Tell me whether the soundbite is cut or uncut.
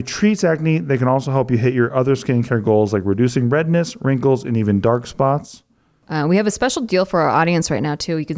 cut